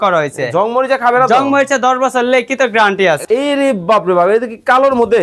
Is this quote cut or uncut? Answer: cut